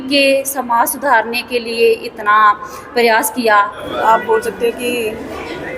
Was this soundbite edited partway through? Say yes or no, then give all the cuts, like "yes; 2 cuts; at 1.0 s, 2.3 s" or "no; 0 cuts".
yes; 1 cut; at 3.8 s